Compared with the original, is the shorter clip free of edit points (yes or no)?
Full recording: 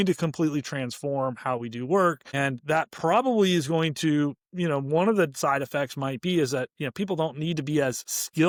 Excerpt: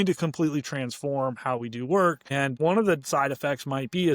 no